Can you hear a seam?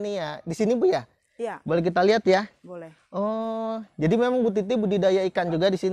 no; 0 cuts

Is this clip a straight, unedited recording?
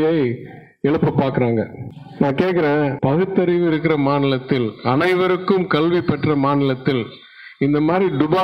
yes; 0 cuts

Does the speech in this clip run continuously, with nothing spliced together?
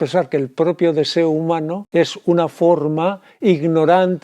no; 1 cut; at 1.8 s

